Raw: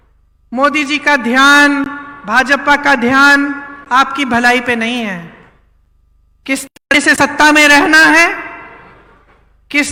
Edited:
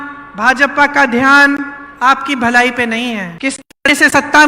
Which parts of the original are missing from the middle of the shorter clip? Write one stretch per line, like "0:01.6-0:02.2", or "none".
0:05.2-0:06.4